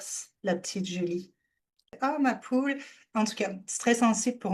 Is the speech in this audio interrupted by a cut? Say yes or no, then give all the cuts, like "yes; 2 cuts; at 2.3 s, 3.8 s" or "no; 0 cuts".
yes; 1 cut; at 1.9 s